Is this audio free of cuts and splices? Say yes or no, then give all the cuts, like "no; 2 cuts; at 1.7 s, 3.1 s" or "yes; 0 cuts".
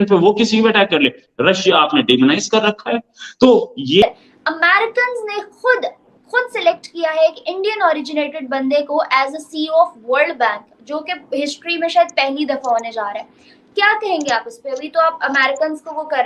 no; 1 cut; at 4.0 s